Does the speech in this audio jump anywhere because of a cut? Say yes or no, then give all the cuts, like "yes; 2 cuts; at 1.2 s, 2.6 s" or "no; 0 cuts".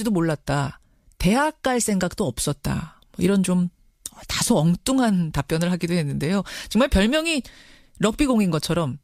yes; 1 cut; at 6.1 s